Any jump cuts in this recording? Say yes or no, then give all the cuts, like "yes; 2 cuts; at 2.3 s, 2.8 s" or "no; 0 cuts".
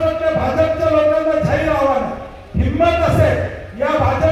no; 0 cuts